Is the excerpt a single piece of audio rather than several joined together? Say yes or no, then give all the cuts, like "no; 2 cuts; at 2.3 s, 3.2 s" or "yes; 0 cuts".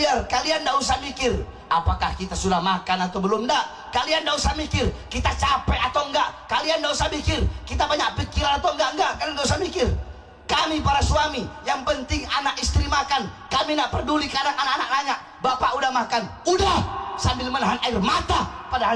yes; 0 cuts